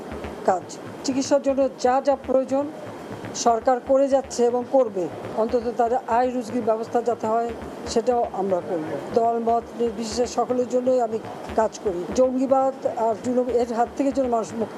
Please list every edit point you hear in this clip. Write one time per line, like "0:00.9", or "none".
0:00.8
0:05.2
0:09.1
0:12.1